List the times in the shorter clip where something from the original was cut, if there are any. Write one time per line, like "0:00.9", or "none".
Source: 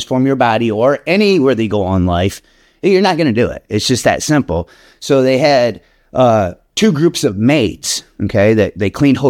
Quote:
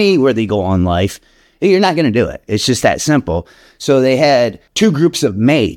0:04.6